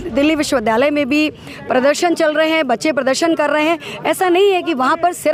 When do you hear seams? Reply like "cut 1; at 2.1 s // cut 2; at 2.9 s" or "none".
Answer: none